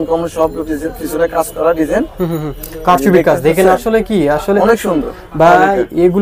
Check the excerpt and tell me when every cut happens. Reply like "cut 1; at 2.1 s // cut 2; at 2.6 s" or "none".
none